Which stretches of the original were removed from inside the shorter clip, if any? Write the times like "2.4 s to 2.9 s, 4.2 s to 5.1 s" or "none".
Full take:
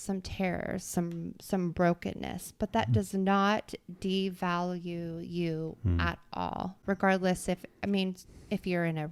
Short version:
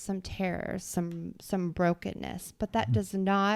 none